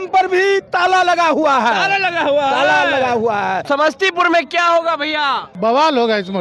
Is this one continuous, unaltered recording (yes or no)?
no